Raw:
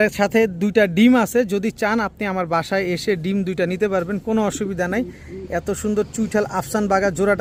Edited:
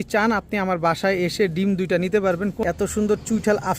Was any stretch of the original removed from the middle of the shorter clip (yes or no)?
yes